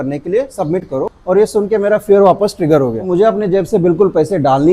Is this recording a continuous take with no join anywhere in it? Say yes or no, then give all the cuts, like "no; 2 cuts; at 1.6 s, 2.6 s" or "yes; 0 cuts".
no; 2 cuts; at 1.1 s, 3.1 s